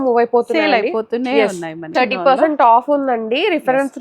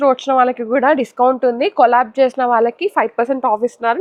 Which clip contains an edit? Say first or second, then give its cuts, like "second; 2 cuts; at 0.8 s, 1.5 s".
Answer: first; 1 cut; at 1.8 s